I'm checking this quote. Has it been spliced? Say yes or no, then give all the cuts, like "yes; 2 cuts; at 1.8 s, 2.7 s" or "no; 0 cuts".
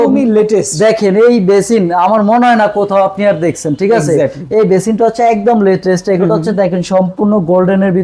no; 0 cuts